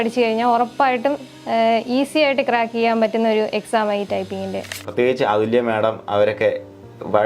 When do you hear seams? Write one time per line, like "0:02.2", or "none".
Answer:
0:04.8